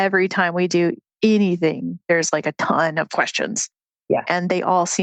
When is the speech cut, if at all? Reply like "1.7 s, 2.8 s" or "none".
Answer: none